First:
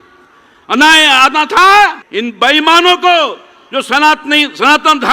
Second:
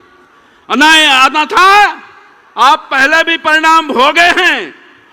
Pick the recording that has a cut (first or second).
first